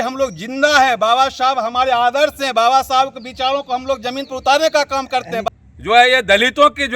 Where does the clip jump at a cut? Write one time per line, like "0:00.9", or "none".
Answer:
0:05.4